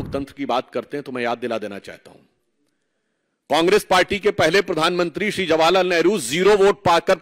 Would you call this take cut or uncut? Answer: uncut